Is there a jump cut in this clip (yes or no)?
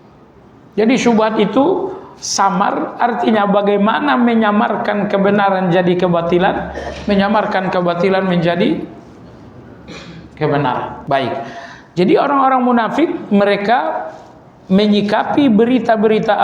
yes